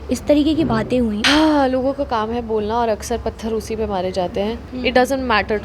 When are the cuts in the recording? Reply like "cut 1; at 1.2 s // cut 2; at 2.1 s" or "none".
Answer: cut 1; at 1.2 s // cut 2; at 4.7 s